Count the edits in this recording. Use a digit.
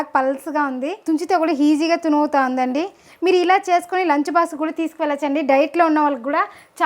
1